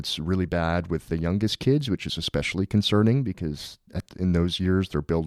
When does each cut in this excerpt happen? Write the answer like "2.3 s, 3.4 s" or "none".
none